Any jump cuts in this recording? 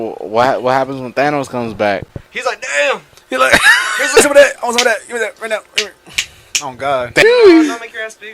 yes; 2 cuts; at 4.2 s, 7.2 s

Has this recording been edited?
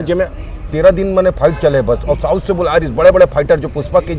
no; 0 cuts

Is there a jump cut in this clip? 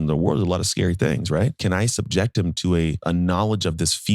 yes; 2 cuts; at 1.6 s, 3.0 s

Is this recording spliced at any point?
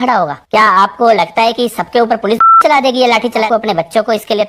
yes; 1 cut; at 3.5 s

